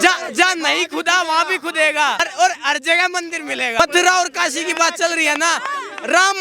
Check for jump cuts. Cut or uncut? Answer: cut